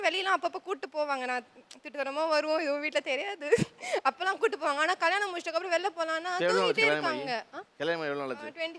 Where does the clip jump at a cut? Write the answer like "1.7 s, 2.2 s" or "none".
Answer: none